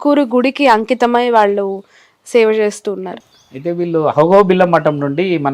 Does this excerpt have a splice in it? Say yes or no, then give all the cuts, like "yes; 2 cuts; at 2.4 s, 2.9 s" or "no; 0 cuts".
yes; 1 cut; at 3.1 s